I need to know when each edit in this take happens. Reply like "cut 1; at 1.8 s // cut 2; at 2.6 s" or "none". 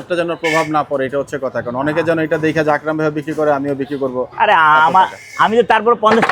none